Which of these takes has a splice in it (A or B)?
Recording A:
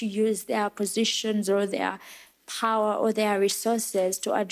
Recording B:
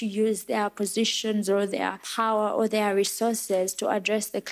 B